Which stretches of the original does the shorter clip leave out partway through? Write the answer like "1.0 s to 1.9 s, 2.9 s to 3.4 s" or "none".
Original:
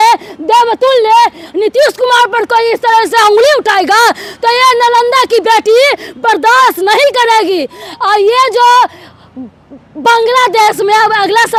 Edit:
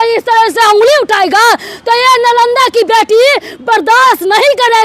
none